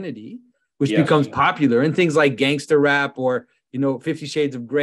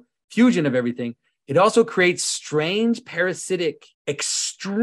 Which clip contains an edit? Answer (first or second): second